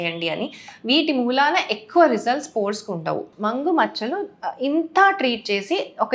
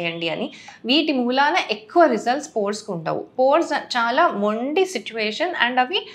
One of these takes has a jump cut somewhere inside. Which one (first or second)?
first